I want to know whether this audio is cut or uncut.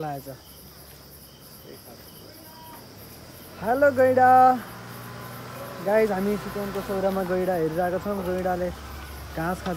uncut